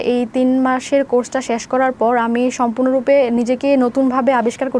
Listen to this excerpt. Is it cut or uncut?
uncut